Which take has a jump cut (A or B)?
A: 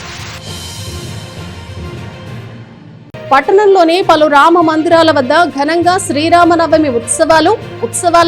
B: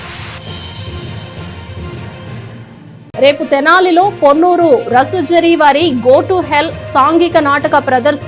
A